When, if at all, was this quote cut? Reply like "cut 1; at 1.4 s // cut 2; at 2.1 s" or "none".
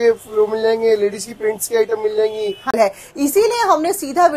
cut 1; at 2.7 s